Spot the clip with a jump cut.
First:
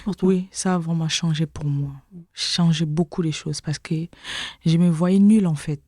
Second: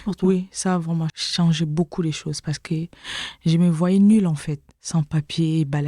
second; 1 cut; at 1.1 s

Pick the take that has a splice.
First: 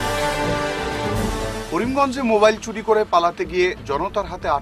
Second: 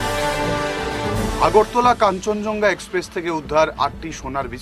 first; 1 cut; at 1.1 s

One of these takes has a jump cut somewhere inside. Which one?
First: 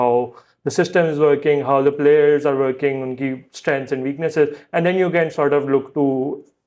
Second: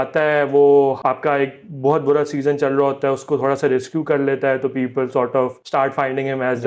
second; 2 cuts; at 1.0 s, 5.6 s

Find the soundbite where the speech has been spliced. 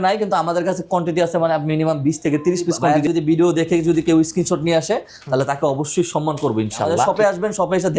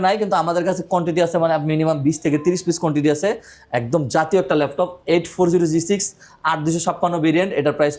first; 2 cuts; at 2.9 s, 7.1 s

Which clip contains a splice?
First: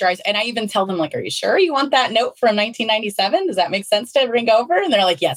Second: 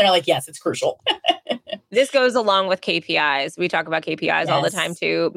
second; 1 cut; at 1.5 s

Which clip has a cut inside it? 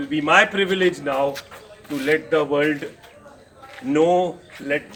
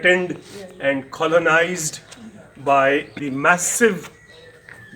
second; 1 cut; at 3.2 s

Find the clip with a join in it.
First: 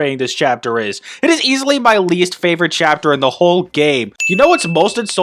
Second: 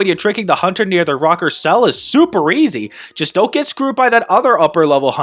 first; 1 cut; at 4.2 s

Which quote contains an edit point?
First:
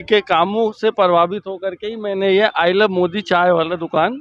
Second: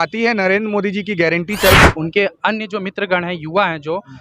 second; 1 cut; at 1.8 s

